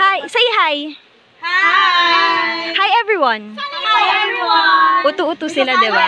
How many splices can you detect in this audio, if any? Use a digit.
0